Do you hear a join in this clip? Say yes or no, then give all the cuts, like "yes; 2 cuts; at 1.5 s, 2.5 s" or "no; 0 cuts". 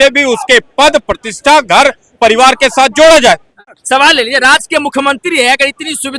yes; 1 cut; at 3.8 s